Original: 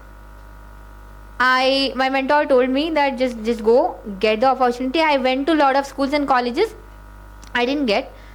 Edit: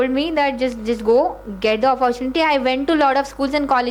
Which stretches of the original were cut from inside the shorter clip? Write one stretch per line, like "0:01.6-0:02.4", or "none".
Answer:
none